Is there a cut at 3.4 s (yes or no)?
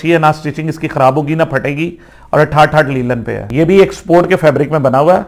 yes